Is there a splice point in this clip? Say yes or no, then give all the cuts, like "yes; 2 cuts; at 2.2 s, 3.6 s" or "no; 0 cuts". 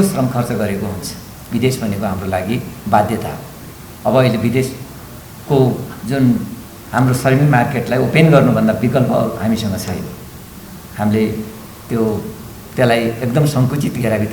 yes; 1 cut; at 1.4 s